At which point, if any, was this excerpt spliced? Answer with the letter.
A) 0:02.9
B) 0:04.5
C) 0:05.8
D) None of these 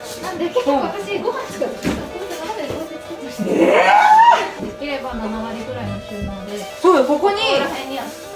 B